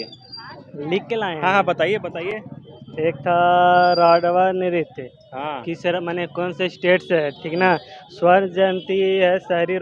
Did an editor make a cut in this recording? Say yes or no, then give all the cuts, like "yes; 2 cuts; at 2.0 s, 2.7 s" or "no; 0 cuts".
no; 0 cuts